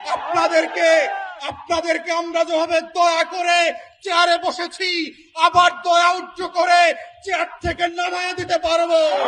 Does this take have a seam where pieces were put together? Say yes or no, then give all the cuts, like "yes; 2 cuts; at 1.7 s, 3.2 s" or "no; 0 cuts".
no; 0 cuts